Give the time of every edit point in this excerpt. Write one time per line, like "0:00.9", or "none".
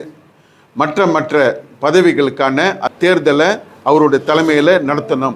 0:02.8